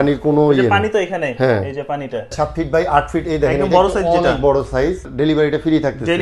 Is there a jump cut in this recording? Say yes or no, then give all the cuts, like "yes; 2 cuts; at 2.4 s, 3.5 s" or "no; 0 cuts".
yes; 2 cuts; at 2.3 s, 5.1 s